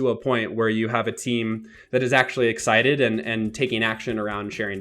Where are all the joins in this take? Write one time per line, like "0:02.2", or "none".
none